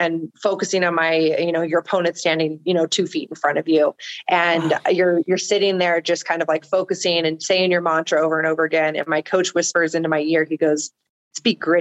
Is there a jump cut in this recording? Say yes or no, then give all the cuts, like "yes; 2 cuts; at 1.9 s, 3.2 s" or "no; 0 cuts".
no; 0 cuts